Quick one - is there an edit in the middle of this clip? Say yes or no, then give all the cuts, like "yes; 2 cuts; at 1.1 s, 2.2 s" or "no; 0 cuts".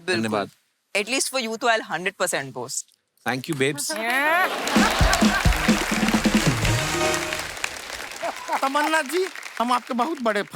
yes; 1 cut; at 8.3 s